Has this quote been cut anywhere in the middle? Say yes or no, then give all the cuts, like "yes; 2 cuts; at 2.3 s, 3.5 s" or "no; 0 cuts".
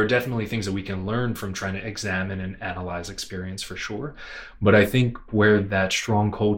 yes; 1 cut; at 5.3 s